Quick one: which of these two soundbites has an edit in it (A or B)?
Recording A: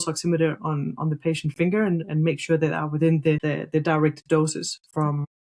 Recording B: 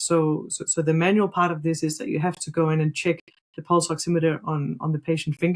A